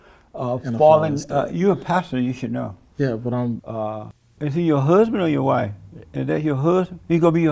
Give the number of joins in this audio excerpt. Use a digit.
1